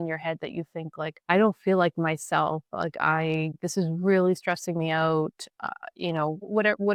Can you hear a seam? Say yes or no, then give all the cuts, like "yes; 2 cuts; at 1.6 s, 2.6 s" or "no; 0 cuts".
no; 0 cuts